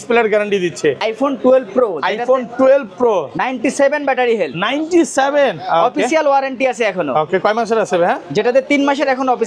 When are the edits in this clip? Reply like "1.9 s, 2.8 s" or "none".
1.0 s